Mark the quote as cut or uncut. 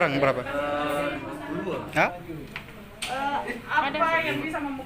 cut